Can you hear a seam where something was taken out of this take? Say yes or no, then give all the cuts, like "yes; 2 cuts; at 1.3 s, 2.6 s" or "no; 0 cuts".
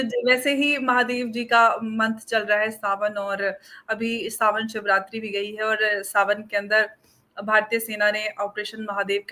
no; 0 cuts